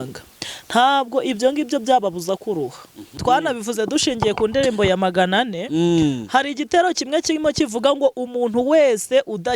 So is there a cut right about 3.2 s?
yes; 1 cut; at 3.2 s

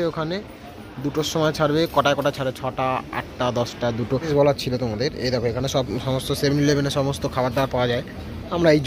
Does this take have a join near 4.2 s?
yes; 1 cut; at 4.2 s

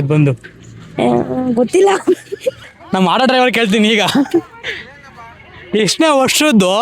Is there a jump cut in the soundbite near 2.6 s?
yes; 1 cut; at 2.6 s

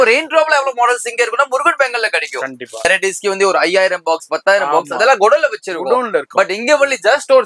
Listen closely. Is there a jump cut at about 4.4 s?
no; 1 cut; at 2.9 s

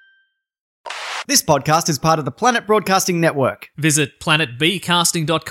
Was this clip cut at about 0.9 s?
yes; 1 cut; at 0.9 s

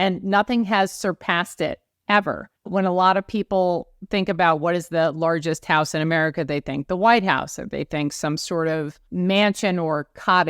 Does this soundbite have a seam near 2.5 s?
yes; 3 cuts; at 1.9 s, 2.5 s, 9.0 s

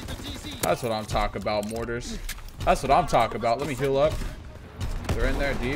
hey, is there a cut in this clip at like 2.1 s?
no; 0 cuts

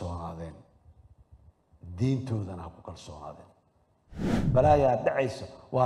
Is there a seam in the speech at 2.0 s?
no; 1 cut; at 4.3 s

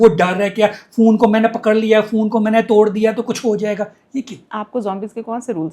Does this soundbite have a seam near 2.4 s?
no; 0 cuts

